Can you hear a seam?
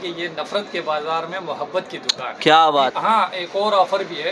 yes; 1 cut; at 2.9 s

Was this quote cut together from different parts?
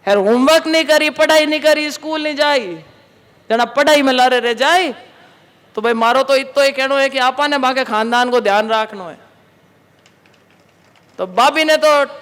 no; 0 cuts

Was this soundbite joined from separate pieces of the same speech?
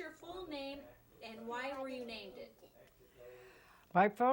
no; 0 cuts

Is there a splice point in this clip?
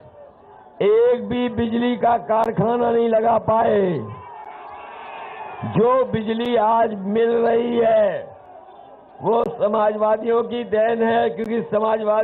no; 0 cuts

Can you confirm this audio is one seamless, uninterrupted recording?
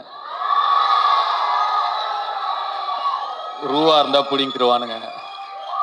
yes; 0 cuts

